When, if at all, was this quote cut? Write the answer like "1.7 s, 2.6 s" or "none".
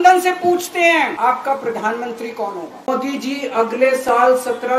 1.1 s, 2.9 s